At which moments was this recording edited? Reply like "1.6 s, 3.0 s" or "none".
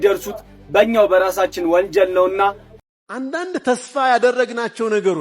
2.7 s